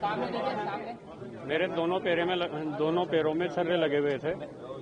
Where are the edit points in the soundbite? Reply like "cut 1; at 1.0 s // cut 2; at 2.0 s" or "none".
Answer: none